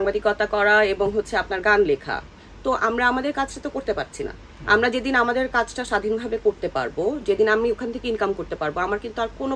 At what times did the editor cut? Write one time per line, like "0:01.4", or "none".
none